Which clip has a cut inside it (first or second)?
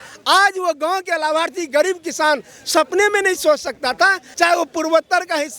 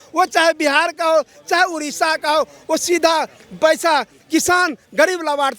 first